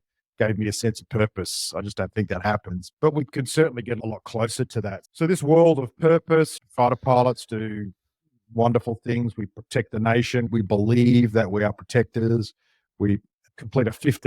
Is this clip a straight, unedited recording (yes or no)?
no